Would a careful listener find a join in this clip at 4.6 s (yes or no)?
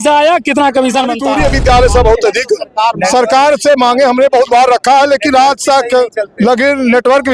no